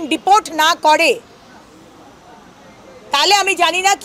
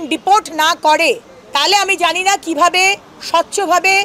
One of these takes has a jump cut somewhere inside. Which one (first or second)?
second